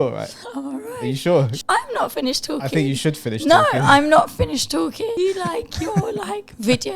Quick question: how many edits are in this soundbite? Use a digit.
2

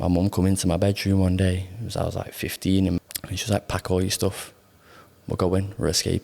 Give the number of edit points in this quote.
1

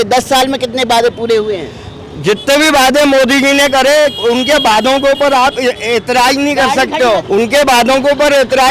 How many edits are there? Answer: 1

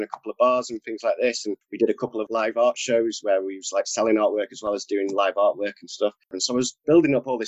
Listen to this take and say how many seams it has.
2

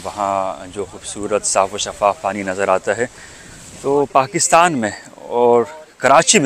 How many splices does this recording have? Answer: 0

